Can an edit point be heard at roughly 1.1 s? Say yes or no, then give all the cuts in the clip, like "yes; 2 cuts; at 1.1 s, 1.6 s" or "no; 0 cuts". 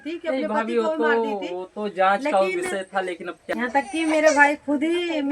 no; 1 cut; at 3.4 s